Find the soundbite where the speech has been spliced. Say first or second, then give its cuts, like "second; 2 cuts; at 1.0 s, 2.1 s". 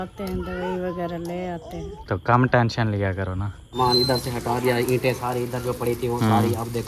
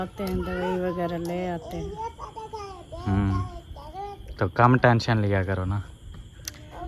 first; 2 cuts; at 1.9 s, 3.8 s